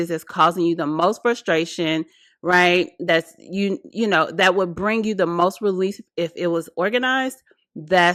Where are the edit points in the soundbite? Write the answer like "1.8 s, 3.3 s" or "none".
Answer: none